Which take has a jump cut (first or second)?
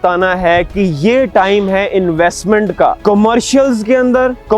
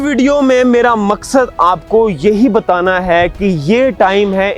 first